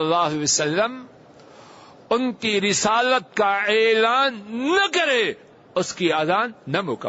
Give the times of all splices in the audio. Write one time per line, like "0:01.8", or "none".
none